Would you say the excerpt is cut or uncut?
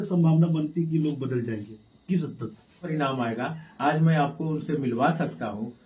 cut